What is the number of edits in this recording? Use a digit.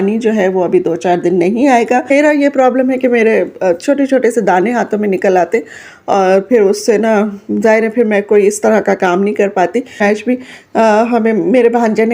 2